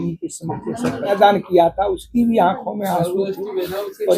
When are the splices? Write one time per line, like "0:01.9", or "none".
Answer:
0:01.1

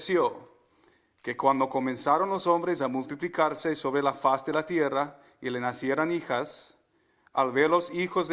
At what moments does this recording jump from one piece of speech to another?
0:04.7

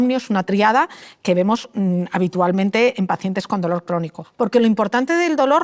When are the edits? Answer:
0:04.2

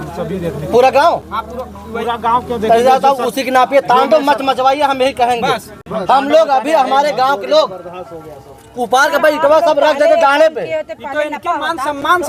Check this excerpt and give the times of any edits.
none

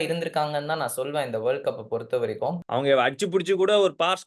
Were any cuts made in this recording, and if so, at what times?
0:02.6

